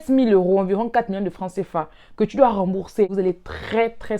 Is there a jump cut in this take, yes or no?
yes